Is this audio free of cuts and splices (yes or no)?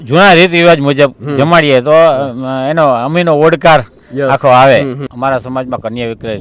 no